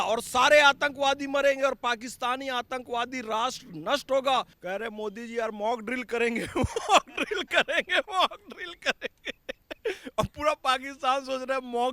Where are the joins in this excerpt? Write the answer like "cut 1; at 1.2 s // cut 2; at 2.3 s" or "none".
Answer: cut 1; at 4.5 s